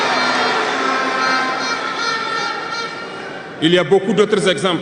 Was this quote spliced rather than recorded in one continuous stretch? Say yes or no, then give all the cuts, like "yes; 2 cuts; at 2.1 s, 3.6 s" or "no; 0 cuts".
no; 0 cuts